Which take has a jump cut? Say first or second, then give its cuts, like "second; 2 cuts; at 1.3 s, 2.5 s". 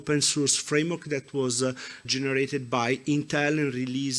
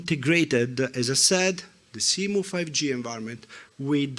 first; 1 cut; at 2.1 s